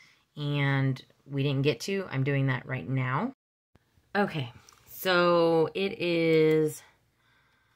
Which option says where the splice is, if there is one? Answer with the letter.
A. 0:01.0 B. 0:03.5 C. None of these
B